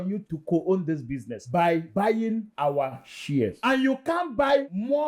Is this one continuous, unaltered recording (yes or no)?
yes